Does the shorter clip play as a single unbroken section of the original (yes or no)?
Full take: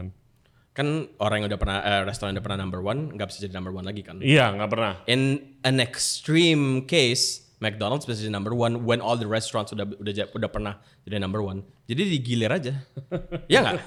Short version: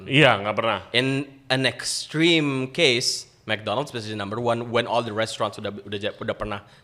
yes